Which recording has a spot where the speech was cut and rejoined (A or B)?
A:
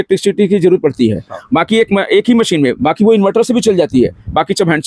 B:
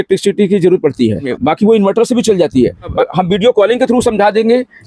B